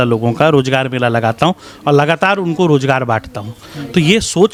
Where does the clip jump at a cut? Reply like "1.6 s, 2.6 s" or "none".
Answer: none